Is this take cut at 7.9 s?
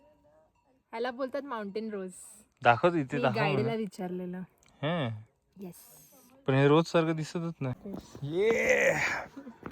yes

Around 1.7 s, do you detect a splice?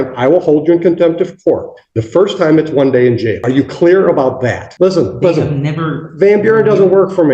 no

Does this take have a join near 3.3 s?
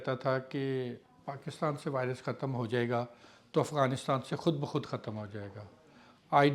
no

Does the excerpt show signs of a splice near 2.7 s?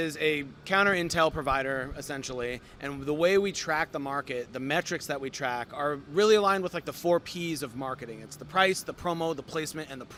no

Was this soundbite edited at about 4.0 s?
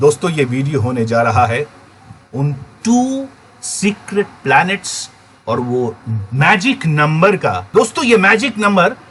no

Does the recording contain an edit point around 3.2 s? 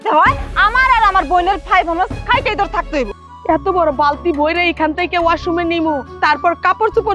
yes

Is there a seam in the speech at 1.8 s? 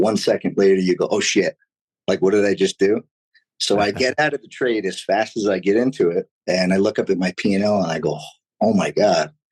no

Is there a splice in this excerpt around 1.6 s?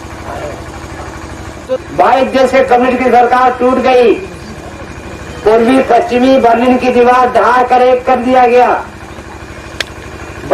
yes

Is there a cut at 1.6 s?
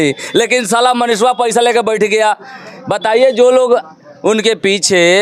no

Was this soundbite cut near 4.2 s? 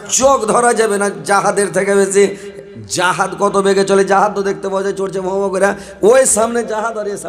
no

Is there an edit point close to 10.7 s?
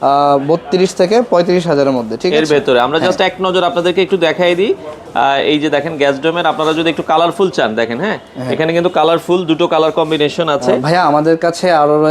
yes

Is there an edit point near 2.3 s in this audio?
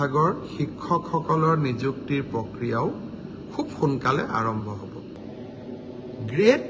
no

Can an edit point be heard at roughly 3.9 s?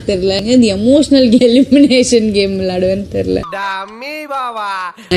no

